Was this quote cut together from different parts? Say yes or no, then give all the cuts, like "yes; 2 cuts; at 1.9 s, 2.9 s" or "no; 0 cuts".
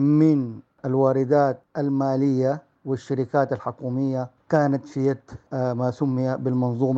no; 0 cuts